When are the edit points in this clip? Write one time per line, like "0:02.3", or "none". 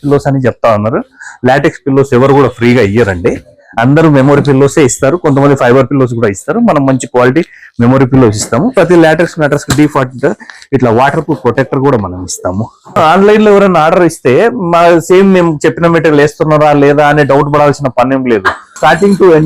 0:13.0